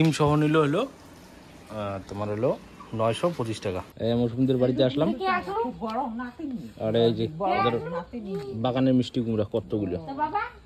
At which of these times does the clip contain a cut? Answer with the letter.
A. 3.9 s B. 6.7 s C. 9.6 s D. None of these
A